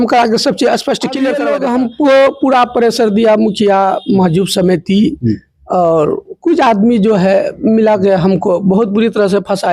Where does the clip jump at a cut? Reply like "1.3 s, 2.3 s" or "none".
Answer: 1.4 s